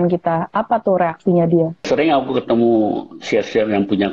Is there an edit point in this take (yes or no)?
yes